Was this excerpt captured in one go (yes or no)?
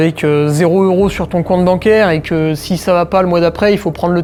yes